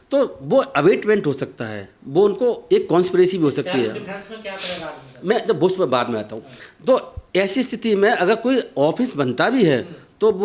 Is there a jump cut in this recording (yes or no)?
no